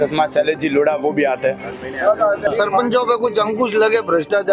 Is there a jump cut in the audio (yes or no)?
yes